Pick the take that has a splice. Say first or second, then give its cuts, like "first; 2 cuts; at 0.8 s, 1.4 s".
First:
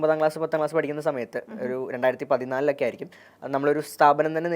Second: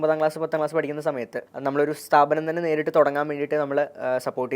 second; 1 cut; at 1.4 s